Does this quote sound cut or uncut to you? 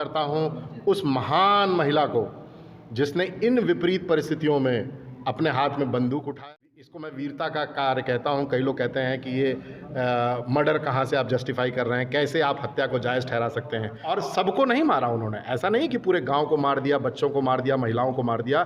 cut